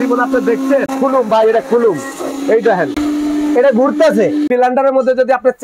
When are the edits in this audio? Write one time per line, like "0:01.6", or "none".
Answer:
0:00.9
0:02.9
0:04.5